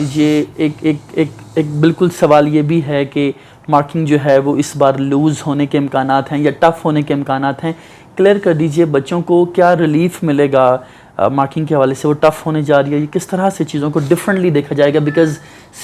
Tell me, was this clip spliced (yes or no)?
no